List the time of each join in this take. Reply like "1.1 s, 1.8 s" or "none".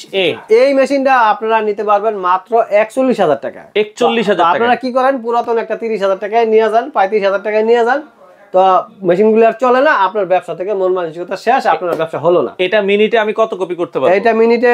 none